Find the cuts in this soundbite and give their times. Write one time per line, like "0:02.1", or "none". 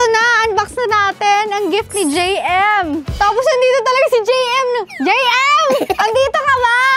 0:03.1